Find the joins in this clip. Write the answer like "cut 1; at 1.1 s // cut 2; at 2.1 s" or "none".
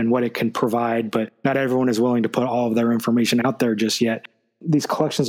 cut 1; at 4.3 s